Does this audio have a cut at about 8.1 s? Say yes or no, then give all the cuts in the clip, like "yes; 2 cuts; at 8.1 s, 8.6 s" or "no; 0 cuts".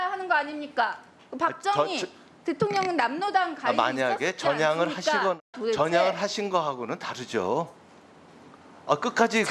no; 1 cut; at 5.4 s